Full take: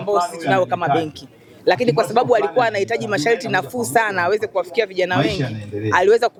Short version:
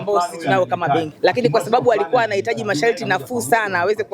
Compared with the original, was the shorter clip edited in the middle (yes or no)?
yes